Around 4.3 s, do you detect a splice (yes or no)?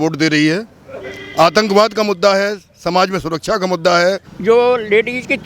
yes